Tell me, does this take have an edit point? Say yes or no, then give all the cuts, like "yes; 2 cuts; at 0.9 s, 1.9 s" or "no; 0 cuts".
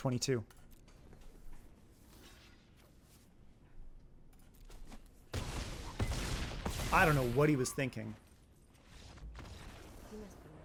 no; 0 cuts